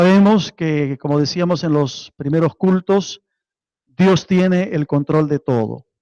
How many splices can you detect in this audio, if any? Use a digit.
1